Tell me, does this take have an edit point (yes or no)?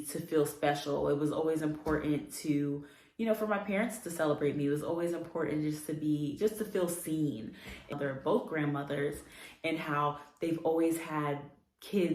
yes